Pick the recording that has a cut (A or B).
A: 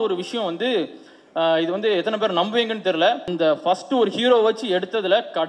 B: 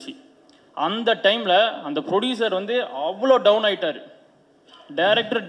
A